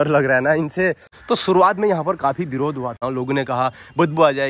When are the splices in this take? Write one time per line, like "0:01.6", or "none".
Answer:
0:01.1
0:03.0